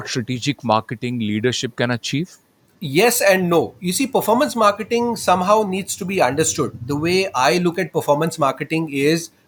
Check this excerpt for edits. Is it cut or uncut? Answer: uncut